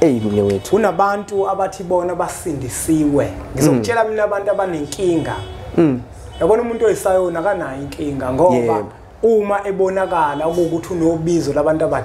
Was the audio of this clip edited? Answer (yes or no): no